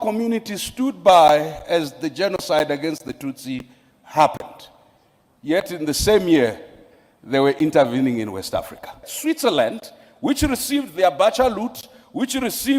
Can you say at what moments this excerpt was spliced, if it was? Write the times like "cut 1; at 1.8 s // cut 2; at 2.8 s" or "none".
cut 1; at 9.1 s